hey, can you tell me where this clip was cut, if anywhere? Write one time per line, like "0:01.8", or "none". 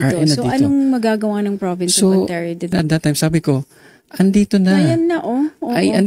none